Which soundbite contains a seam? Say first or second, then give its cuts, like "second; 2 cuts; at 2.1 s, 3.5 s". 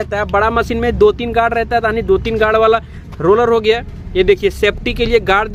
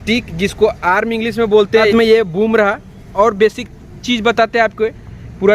second; 1 cut; at 1.9 s